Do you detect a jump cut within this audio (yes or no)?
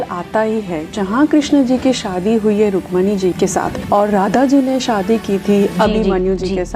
yes